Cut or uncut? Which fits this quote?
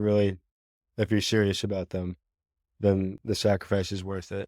uncut